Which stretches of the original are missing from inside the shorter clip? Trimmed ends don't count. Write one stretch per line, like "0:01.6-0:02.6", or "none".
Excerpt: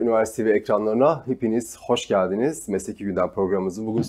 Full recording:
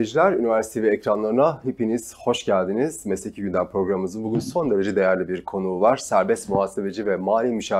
none